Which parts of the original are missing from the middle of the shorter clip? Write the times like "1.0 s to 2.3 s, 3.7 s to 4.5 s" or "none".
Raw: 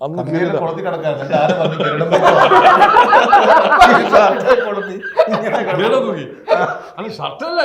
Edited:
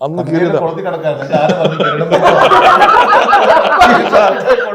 none